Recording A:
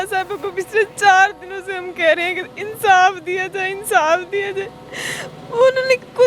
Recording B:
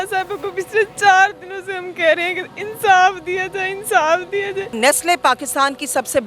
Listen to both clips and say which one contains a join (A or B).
B